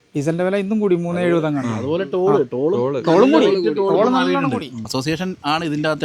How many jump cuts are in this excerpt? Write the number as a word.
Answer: one